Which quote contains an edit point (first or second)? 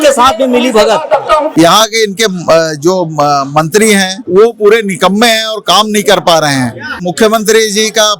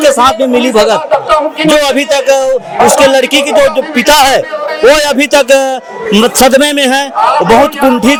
first